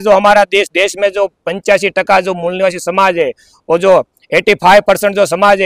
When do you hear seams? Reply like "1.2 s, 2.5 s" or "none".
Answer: none